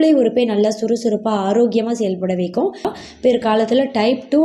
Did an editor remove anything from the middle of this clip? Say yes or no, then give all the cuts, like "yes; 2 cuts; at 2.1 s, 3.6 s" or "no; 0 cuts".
yes; 1 cut; at 3.0 s